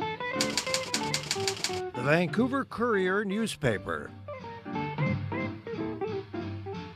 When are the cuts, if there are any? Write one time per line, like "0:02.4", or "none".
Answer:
none